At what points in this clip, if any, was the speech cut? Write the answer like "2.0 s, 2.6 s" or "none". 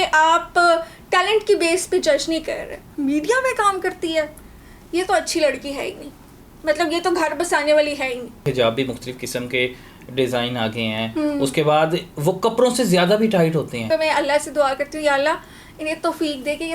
2.8 s, 8.4 s, 13.9 s